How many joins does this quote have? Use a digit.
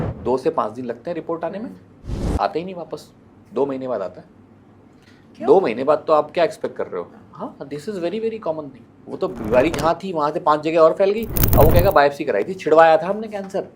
1